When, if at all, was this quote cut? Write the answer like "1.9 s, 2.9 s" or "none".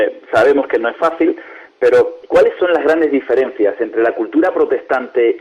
3.6 s